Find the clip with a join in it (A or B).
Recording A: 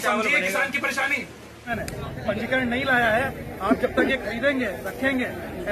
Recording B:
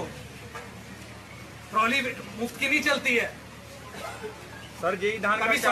A